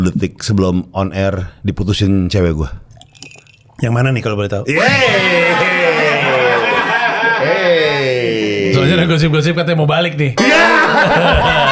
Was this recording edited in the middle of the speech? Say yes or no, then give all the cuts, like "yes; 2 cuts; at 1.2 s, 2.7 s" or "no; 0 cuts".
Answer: no; 0 cuts